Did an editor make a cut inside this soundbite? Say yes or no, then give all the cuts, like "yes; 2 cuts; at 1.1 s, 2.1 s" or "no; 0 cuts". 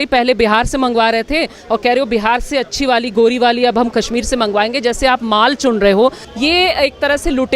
yes; 1 cut; at 6.2 s